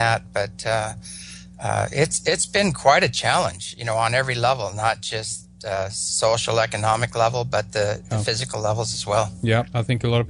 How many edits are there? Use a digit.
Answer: 0